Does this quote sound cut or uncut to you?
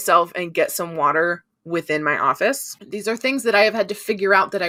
uncut